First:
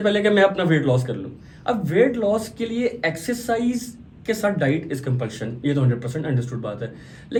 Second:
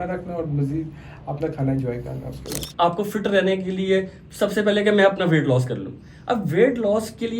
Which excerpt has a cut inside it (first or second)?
second